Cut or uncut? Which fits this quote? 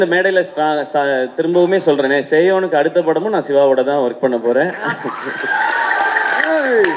uncut